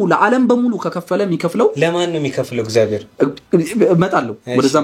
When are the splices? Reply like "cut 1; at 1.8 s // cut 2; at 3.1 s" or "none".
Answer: cut 1; at 3.1 s